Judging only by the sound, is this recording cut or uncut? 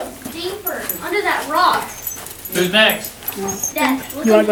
uncut